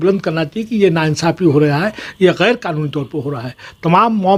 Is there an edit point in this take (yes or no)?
no